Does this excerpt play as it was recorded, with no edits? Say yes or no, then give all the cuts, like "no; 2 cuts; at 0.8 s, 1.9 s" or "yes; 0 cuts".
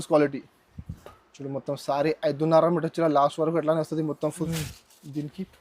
no; 1 cut; at 4.5 s